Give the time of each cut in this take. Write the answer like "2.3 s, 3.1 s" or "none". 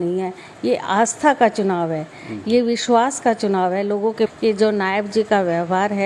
4.3 s